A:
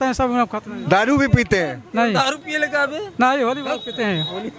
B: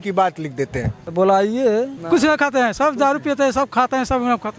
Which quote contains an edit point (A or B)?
B